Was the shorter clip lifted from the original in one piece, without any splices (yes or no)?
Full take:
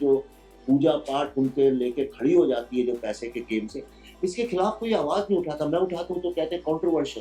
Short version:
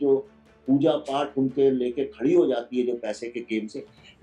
yes